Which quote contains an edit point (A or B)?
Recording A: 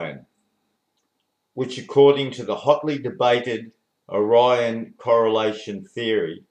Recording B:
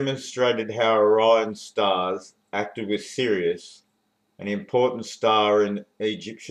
A